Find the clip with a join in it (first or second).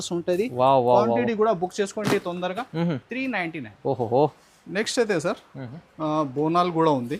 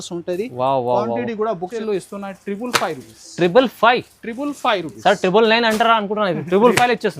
second